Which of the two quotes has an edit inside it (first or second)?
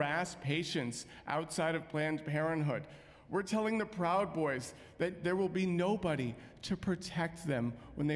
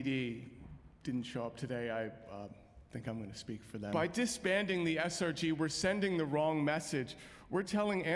second